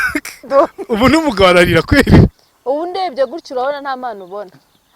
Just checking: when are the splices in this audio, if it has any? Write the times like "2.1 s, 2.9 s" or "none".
2.5 s